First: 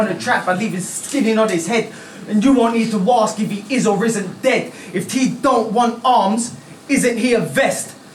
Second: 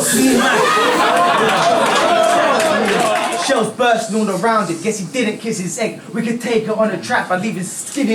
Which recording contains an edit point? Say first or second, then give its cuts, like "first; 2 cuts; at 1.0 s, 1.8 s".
second; 1 cut; at 3.3 s